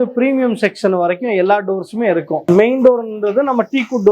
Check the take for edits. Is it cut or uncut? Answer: cut